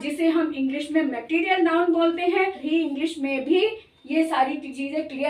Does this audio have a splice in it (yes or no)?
yes